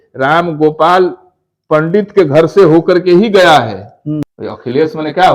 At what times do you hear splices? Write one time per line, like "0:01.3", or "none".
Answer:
0:04.2